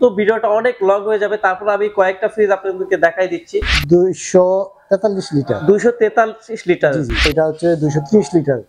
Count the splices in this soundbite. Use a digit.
2